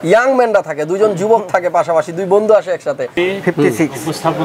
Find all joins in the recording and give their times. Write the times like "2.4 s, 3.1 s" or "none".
3.1 s